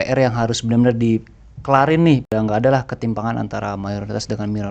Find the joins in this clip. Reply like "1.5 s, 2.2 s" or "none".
none